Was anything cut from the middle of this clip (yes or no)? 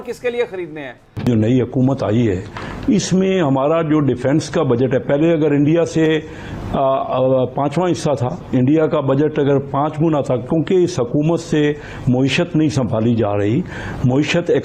no